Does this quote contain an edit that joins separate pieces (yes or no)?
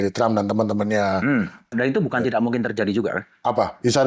yes